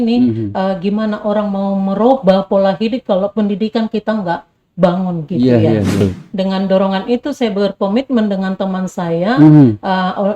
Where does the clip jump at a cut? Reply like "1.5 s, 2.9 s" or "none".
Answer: 6.0 s